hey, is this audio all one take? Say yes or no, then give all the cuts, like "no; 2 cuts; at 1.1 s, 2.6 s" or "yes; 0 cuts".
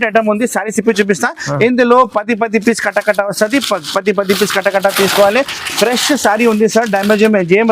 yes; 0 cuts